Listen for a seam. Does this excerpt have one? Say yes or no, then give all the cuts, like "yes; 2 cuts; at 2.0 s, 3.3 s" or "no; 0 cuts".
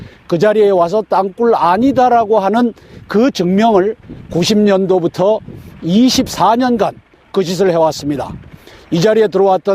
yes; 1 cut; at 5.0 s